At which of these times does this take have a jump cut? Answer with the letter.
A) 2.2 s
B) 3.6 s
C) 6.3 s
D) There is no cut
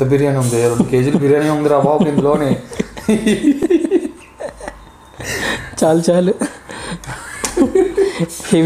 D